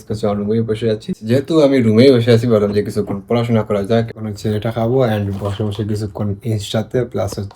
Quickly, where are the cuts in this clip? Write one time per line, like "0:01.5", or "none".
0:01.2
0:04.1